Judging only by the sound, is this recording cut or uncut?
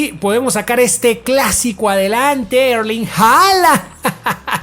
uncut